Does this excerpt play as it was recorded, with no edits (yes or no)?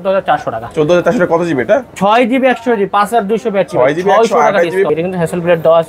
no